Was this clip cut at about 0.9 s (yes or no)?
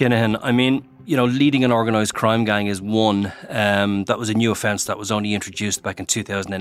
yes